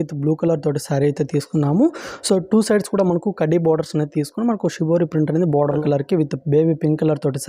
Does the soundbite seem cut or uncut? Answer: cut